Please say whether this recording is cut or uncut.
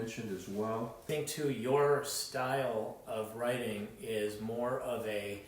cut